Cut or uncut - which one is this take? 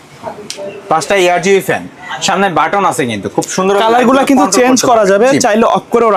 uncut